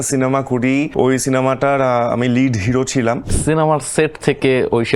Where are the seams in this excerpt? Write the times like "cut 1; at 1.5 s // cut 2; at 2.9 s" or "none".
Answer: cut 1; at 0.9 s // cut 2; at 3.3 s